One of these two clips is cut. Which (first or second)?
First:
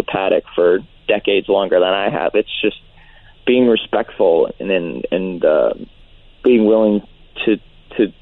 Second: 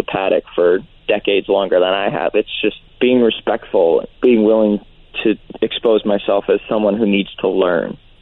second